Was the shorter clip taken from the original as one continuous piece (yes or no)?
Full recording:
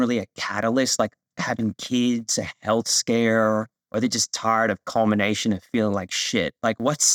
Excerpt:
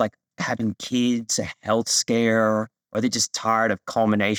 yes